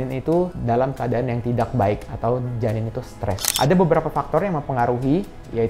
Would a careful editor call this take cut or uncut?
cut